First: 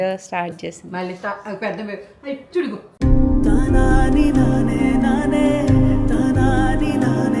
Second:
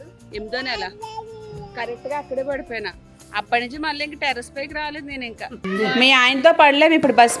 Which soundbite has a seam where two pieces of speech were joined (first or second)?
second